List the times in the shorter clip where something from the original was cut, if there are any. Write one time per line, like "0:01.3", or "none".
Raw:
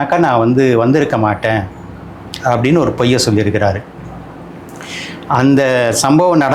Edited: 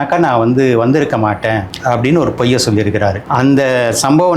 0:01.7
0:03.2